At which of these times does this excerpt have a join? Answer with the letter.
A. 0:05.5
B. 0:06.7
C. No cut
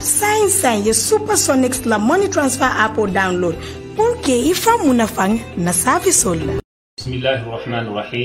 B